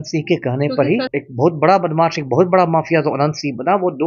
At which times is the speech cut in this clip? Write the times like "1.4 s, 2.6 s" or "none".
1.1 s